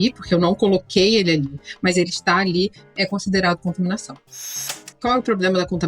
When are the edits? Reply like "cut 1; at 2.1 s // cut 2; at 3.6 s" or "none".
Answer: cut 1; at 4.7 s